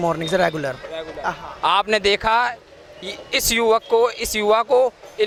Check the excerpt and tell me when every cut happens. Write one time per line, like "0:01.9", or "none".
none